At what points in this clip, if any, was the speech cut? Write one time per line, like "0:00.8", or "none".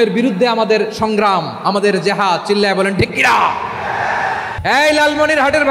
0:04.5

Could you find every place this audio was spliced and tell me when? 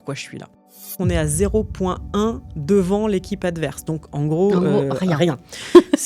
0:01.0

